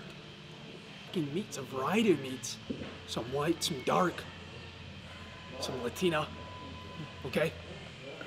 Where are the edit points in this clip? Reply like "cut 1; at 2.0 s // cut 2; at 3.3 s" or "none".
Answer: cut 1; at 1.1 s